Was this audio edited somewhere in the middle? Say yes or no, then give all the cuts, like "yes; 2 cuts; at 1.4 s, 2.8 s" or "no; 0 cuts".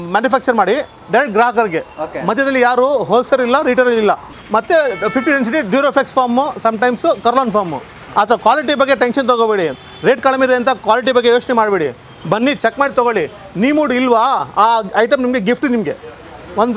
yes; 1 cut; at 4.3 s